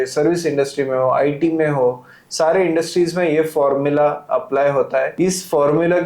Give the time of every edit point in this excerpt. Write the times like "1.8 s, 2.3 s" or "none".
5.1 s